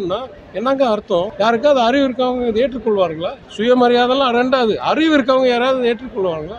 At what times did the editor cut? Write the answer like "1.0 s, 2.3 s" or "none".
1.3 s, 3.4 s